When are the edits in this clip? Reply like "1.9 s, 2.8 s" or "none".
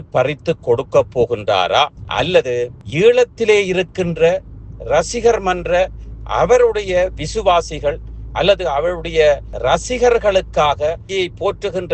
9.5 s, 11.0 s

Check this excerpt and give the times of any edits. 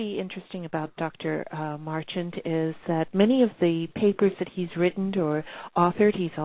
none

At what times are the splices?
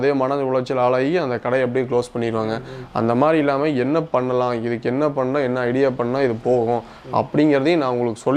none

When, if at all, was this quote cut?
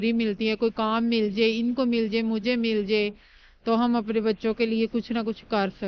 none

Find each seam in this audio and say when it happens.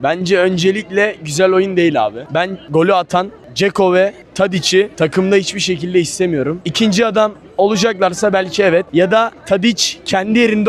none

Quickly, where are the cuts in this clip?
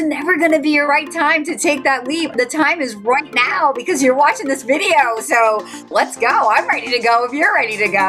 0.9 s, 5.9 s

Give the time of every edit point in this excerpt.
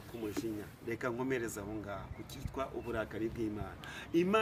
none

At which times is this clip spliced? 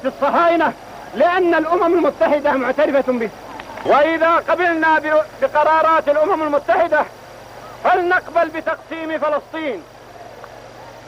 3.7 s

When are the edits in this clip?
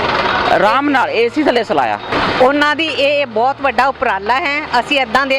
2.1 s

